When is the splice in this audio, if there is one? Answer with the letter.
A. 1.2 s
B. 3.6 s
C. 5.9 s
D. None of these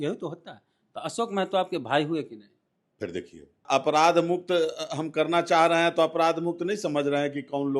B